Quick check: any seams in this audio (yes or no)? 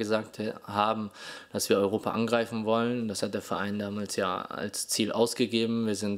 no